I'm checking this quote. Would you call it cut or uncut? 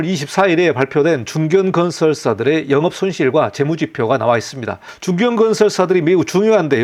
uncut